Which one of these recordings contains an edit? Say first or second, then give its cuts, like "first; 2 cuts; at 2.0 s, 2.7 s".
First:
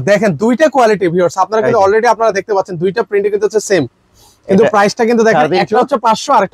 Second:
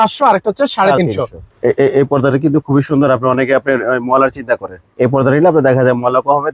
second; 2 cuts; at 1.5 s, 4.8 s